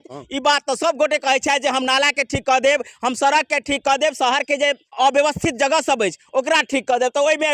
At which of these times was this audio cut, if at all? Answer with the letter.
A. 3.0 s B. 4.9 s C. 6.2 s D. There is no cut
B